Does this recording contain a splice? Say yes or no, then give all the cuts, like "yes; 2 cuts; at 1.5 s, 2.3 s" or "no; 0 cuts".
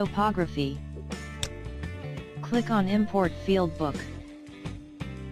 no; 0 cuts